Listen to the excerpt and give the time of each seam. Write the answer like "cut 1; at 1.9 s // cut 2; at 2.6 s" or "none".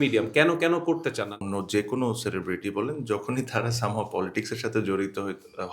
cut 1; at 1.3 s